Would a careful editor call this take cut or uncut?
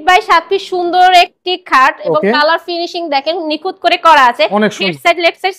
uncut